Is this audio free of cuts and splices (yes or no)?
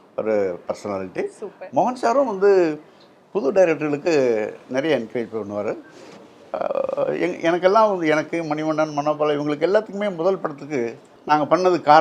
no